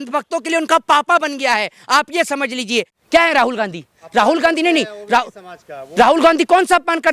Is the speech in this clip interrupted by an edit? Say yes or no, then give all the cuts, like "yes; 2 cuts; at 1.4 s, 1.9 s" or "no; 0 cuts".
yes; 1 cut; at 2.9 s